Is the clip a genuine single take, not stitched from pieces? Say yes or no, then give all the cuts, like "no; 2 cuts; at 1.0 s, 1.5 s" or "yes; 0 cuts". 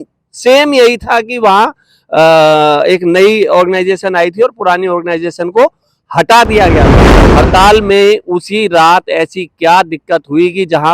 no; 1 cut; at 7.2 s